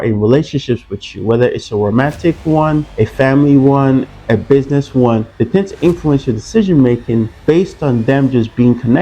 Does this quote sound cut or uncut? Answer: cut